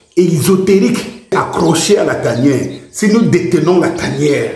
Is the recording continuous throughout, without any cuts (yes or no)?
no